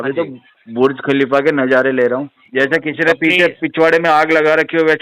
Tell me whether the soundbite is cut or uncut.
cut